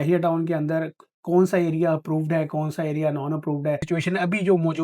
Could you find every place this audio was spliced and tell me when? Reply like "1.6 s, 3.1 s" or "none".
3.9 s